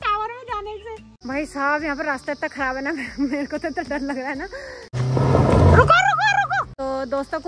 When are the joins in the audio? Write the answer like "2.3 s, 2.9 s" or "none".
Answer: 1.1 s, 4.9 s, 6.7 s